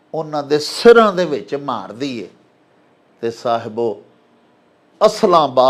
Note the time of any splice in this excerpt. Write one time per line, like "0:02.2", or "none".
none